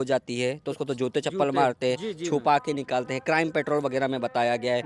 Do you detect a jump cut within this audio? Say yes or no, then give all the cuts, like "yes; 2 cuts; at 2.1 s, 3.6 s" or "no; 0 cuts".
no; 0 cuts